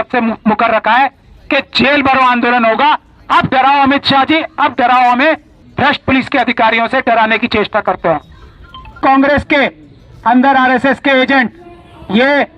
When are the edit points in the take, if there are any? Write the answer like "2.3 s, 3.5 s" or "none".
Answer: 5.6 s, 9.0 s